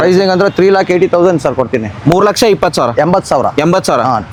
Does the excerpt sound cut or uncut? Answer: uncut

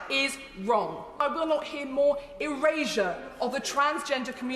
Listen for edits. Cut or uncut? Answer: cut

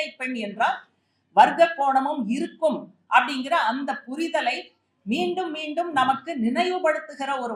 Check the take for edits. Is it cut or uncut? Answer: uncut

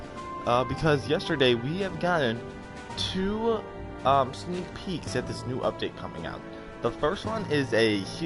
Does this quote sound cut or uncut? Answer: uncut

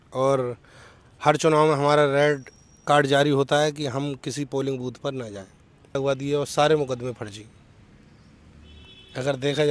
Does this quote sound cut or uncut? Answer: cut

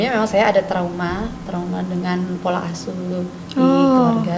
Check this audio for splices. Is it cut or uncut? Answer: uncut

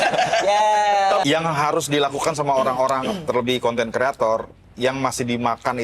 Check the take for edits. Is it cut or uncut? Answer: cut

